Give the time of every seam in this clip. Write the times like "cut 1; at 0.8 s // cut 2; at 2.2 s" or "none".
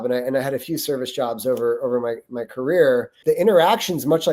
cut 1; at 3.2 s